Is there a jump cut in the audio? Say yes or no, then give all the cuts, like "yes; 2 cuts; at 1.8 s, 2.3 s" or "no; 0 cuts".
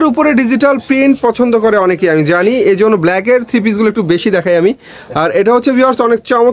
no; 0 cuts